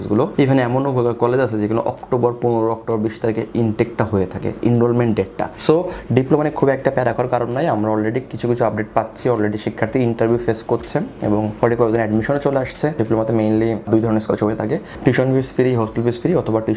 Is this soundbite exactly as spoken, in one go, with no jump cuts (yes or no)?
no